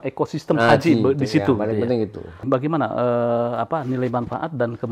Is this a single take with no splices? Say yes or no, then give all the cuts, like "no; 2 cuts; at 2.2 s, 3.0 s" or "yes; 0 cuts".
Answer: no; 1 cut; at 2.4 s